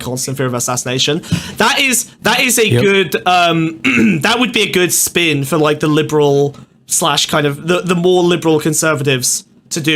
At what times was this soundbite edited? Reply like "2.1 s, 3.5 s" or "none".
none